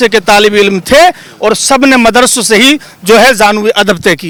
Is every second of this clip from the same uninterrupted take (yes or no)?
yes